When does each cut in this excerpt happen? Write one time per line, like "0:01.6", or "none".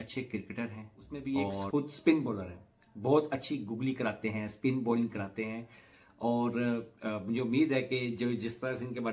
0:01.2